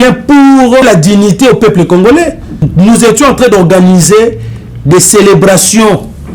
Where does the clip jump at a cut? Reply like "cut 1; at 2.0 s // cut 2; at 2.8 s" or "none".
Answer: cut 1; at 0.8 s // cut 2; at 2.7 s

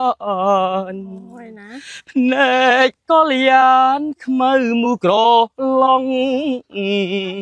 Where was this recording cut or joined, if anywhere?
none

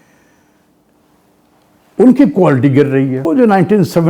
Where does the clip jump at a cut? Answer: cut 1; at 3.2 s

